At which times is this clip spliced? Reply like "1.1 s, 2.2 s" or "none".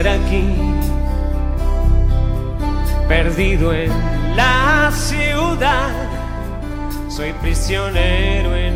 none

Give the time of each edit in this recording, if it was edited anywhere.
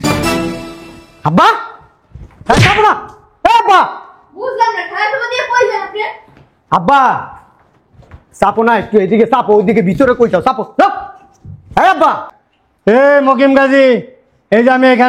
none

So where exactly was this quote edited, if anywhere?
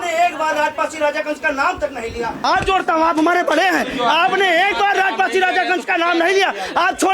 2.4 s

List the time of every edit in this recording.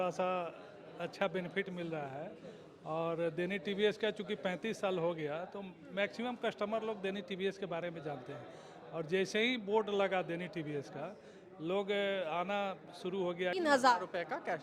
13.5 s

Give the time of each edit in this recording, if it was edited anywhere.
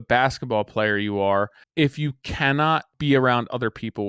1.6 s, 2.9 s

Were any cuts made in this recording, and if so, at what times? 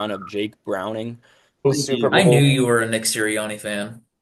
1.7 s

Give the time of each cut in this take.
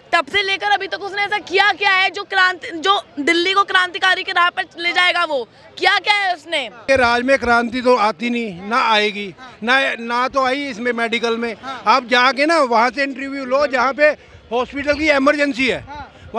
6.8 s

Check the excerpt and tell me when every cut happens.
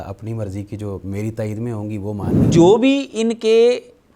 2.5 s

